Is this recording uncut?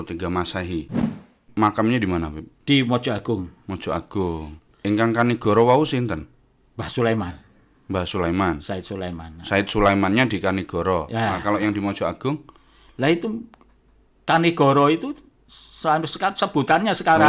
no; 2 cuts; at 1.3 s, 4.6 s

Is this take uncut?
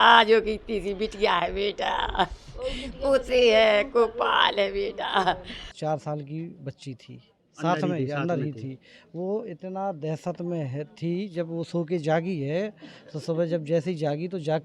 no; 1 cut; at 5.7 s

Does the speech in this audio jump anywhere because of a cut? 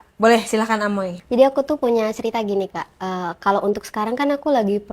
yes; 1 cut; at 1.2 s

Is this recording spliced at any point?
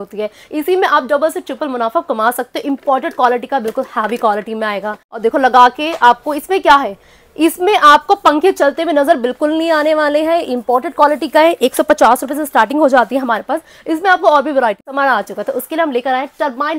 yes; 2 cuts; at 5.1 s, 14.9 s

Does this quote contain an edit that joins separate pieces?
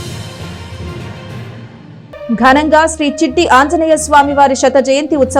no; 0 cuts

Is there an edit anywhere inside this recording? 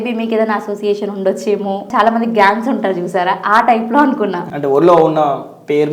yes; 2 cuts; at 1.9 s, 4.5 s

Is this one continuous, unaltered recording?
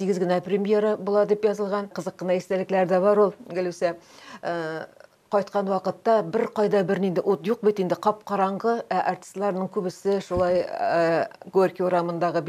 no; 1 cut; at 2.1 s

